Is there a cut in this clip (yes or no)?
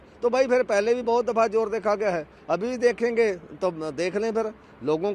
no